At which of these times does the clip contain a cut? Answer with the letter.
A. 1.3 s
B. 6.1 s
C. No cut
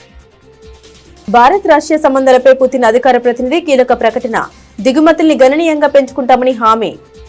C